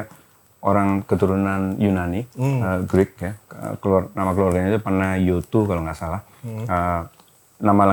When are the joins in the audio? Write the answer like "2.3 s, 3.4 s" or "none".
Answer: none